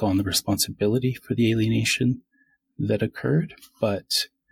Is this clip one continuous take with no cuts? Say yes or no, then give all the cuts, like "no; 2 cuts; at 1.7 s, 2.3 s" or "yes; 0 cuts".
yes; 0 cuts